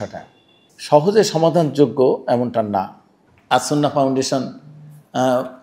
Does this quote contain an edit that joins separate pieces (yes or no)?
no